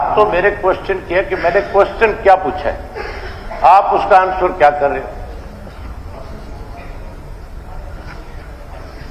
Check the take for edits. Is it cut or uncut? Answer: uncut